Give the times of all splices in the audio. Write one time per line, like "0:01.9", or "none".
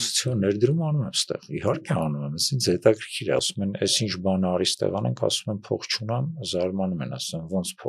0:03.4